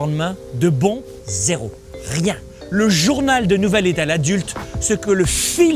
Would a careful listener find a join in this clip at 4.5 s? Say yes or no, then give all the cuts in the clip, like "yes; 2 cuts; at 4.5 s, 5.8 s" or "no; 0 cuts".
no; 2 cuts; at 1.0 s, 2.5 s